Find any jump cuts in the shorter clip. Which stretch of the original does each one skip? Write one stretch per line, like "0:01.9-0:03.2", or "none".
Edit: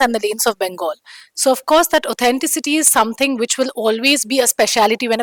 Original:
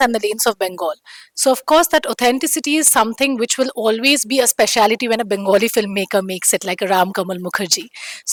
none